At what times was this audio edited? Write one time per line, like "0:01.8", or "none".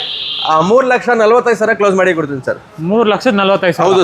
none